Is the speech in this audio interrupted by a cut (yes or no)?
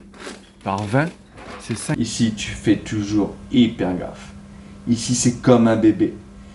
yes